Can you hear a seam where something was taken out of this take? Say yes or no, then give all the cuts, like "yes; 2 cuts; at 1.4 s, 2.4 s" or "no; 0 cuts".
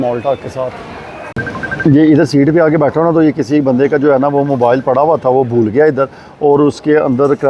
yes; 1 cut; at 1.3 s